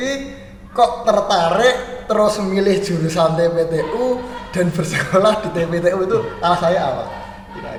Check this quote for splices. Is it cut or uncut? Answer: uncut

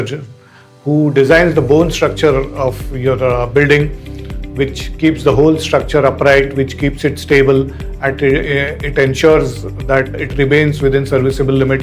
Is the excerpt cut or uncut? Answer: uncut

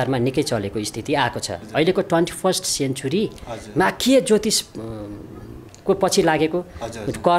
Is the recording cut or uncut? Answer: cut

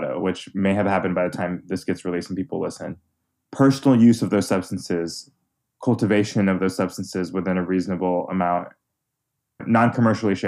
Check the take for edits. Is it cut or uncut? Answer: cut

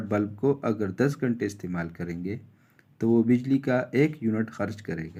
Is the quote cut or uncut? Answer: uncut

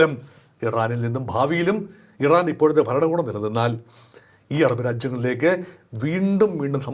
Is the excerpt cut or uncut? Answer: uncut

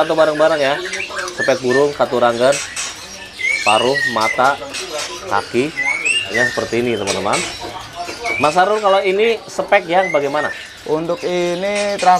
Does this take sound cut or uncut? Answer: cut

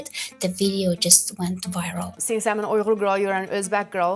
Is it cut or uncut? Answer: cut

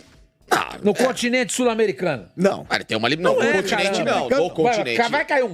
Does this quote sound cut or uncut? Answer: uncut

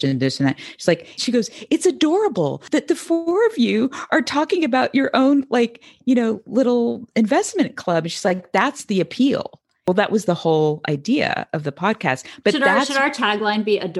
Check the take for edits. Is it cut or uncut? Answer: cut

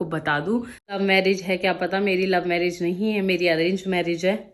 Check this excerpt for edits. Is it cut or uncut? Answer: cut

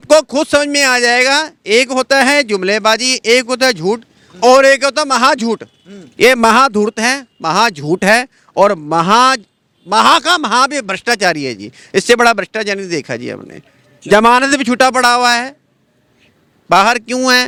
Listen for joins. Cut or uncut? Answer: uncut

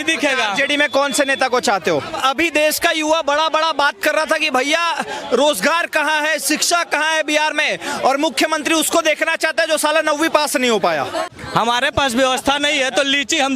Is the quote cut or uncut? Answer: cut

